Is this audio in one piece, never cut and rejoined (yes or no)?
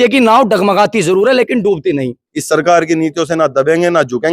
no